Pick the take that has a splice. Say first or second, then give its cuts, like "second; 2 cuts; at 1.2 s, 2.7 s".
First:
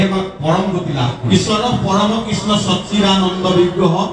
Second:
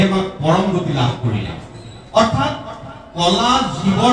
first; 1 cut; at 1.2 s